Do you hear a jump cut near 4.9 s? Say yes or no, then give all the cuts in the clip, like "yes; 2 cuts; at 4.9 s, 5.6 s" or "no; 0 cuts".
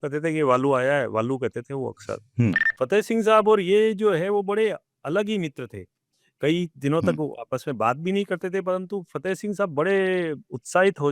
no; 1 cut; at 2.7 s